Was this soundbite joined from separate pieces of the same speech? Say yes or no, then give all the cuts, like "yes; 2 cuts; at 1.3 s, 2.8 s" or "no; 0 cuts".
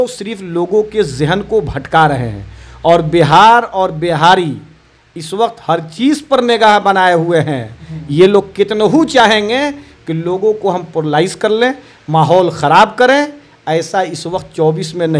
no; 0 cuts